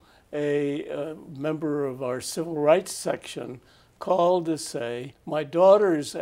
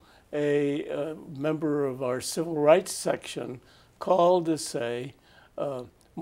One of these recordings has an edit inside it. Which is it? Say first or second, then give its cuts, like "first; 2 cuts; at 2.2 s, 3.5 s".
first; 1 cut; at 5.1 s